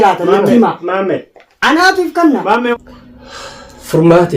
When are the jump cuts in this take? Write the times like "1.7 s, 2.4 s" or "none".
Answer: 2.7 s

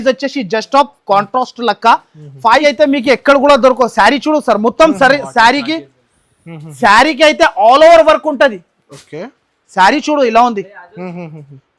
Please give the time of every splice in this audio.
2.6 s

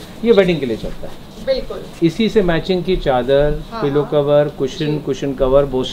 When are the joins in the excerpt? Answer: none

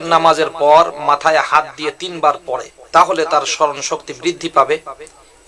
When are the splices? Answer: 2.7 s

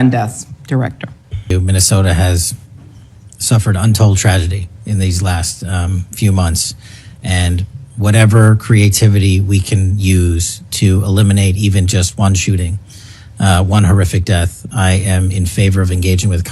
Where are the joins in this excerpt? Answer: 1.5 s

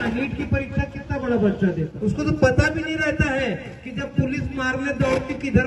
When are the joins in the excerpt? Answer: 1.9 s

